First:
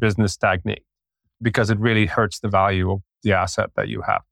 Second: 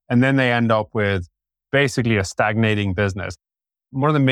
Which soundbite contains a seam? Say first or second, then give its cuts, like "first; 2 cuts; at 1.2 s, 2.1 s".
first; 1 cut; at 3.1 s